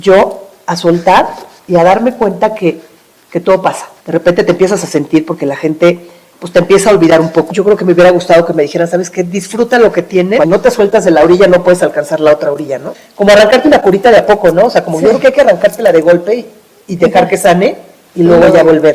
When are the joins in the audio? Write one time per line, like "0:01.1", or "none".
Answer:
0:03.9
0:07.5
0:10.4
0:13.0

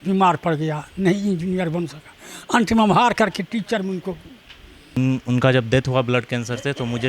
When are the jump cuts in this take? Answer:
0:05.0

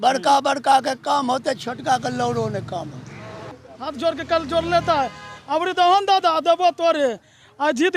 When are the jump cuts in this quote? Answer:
0:03.5

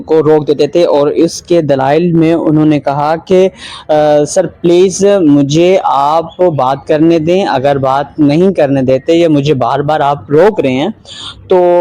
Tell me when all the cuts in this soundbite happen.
none

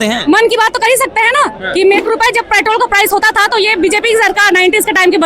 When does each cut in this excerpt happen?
0:02.0

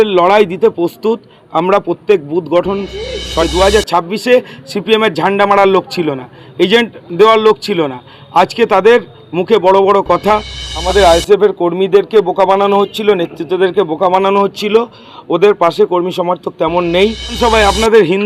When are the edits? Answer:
0:03.5
0:10.7
0:17.4

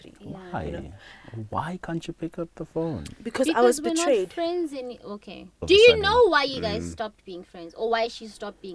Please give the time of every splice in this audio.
0:05.6

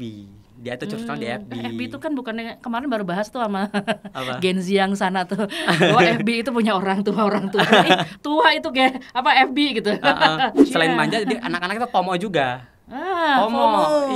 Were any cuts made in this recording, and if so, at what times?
0:10.7

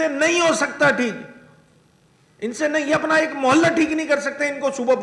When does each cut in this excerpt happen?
none

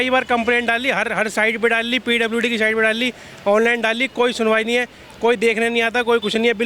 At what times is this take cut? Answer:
none

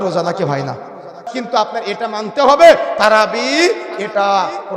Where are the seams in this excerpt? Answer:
0:01.2

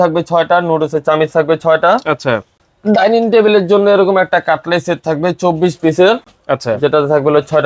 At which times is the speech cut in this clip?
none

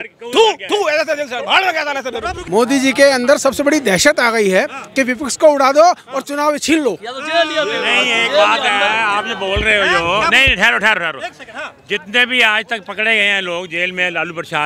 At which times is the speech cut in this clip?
0:02.4

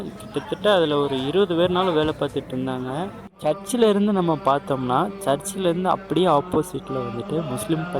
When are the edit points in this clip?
0:03.4

